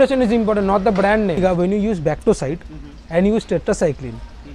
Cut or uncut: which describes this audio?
cut